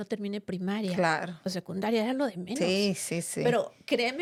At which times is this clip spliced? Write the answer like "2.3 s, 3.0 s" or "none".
none